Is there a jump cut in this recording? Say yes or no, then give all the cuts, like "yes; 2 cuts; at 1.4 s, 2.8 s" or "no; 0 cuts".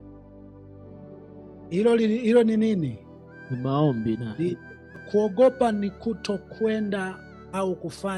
yes; 1 cut; at 5.0 s